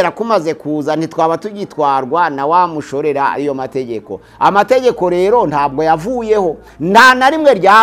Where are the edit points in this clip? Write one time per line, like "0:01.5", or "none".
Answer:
none